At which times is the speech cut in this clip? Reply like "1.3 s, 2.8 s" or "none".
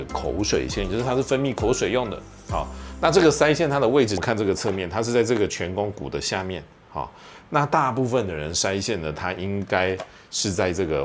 4.2 s